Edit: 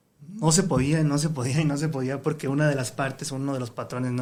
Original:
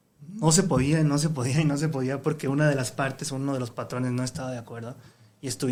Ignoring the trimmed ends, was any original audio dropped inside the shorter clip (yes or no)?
no